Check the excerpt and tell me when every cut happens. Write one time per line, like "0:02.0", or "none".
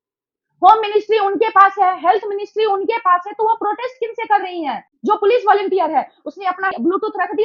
0:04.9